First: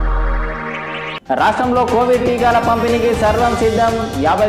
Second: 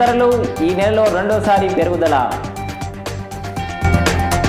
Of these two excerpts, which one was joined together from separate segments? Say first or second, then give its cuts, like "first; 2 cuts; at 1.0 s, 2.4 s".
first; 1 cut; at 1.1 s